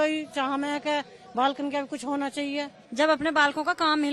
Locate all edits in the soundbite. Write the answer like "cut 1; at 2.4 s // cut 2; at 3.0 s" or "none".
cut 1; at 2.8 s